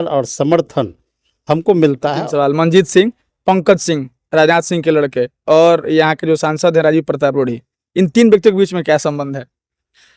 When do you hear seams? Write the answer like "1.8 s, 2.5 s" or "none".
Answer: 2.2 s

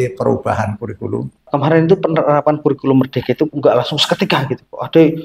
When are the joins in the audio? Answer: 1.4 s

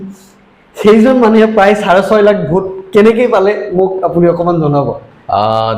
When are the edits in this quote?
none

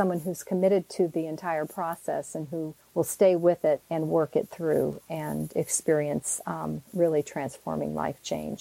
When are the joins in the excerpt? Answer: 2.8 s, 3.9 s

